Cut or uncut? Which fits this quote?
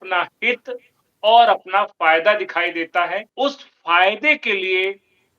cut